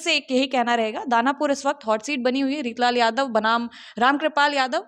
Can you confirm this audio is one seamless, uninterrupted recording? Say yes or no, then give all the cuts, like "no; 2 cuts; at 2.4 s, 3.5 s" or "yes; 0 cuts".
yes; 0 cuts